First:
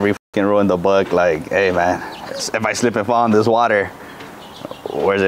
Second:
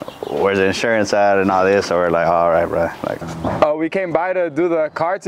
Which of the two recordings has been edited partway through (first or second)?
second